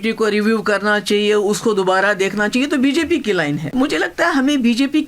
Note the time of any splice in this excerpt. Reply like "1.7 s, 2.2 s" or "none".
3.6 s